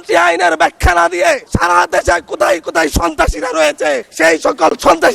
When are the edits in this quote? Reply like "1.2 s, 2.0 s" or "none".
1.5 s, 4.1 s